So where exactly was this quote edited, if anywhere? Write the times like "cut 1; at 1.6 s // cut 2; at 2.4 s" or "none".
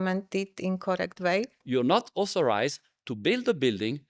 cut 1; at 1.6 s